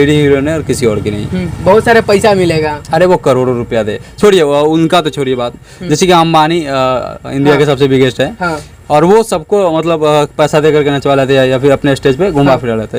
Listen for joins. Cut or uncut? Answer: uncut